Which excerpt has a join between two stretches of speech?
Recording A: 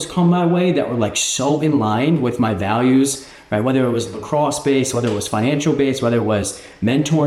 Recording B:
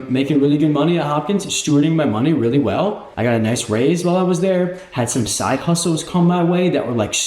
B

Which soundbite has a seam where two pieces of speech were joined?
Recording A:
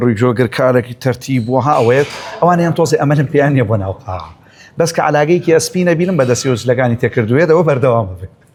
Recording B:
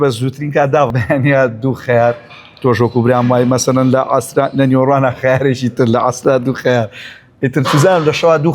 B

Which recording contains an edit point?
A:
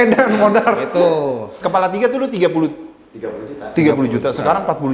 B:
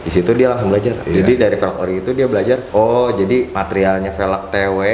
B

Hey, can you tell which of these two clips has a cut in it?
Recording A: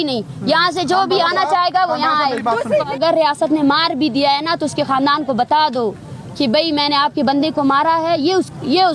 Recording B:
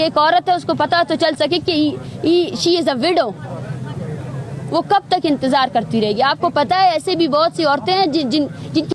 A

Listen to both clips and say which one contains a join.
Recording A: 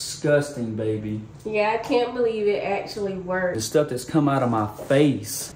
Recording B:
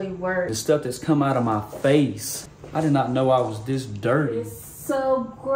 B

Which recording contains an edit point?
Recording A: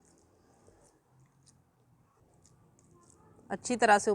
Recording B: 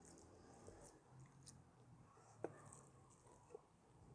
A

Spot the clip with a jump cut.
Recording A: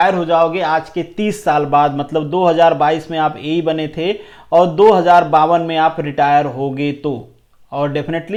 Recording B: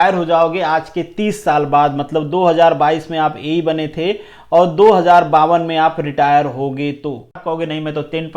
B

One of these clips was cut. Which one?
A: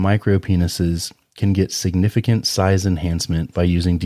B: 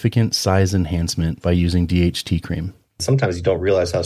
B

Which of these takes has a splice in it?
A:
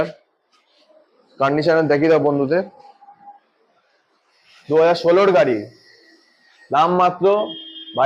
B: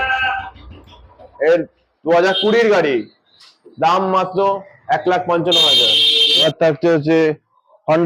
B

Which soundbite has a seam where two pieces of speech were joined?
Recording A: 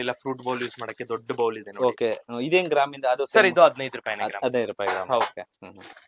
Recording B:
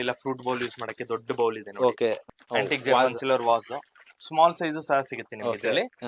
B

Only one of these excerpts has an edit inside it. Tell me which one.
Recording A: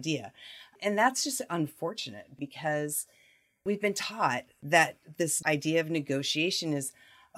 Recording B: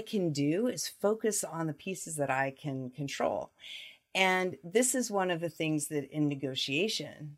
A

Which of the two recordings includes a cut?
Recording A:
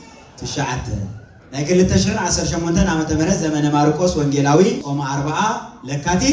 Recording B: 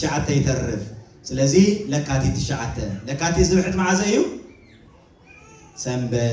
A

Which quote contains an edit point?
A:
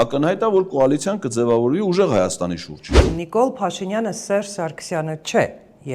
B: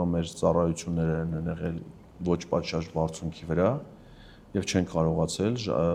A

